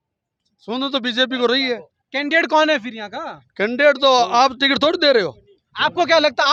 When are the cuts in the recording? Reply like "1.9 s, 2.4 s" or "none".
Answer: none